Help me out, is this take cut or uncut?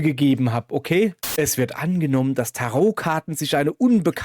cut